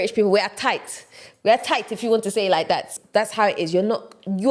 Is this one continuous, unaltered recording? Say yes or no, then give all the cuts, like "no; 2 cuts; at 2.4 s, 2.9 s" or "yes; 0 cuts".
no; 1 cut; at 2.9 s